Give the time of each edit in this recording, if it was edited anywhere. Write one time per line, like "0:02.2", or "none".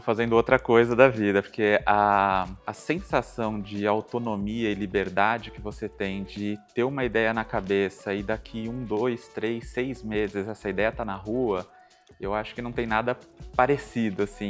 none

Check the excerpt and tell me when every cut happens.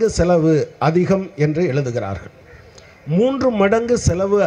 none

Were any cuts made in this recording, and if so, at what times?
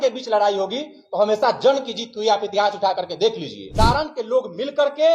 0:03.6

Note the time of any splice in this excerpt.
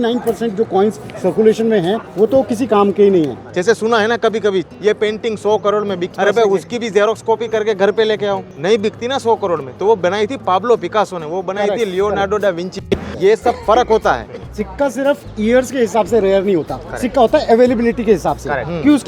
0:02.1
0:03.4
0:04.7
0:06.1
0:08.5
0:13.1
0:14.6

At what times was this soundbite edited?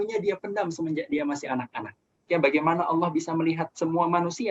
0:02.2

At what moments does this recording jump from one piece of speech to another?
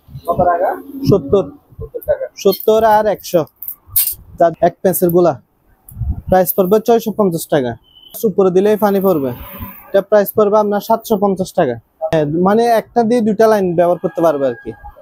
0:04.5
0:08.2
0:12.1

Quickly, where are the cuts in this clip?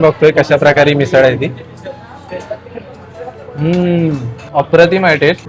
0:04.4

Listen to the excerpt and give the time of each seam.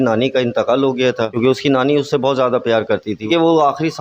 0:01.3
0:03.3

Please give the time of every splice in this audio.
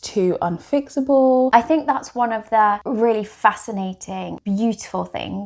0:01.5
0:02.8
0:04.3

